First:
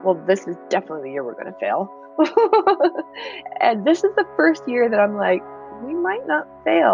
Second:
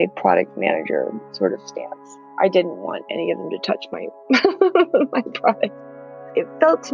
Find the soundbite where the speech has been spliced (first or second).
second